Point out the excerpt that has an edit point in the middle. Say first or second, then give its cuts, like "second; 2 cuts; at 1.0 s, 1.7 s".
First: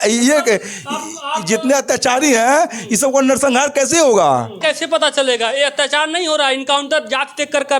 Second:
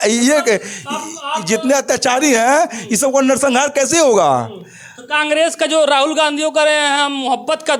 first; 1 cut; at 4.6 s